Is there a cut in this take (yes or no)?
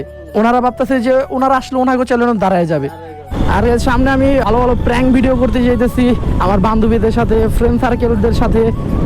yes